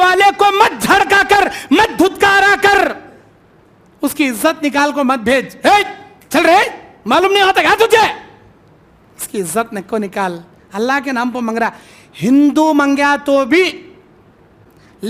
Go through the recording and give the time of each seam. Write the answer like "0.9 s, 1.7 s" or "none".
none